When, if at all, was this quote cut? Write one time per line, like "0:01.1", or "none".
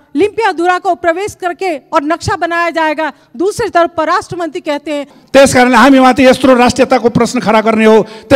0:05.1